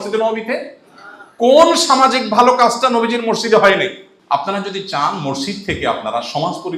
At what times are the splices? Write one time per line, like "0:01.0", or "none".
0:04.1